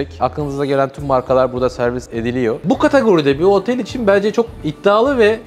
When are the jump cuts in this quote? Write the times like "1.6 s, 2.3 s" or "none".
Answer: 2.6 s